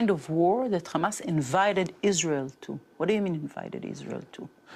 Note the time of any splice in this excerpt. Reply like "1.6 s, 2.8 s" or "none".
none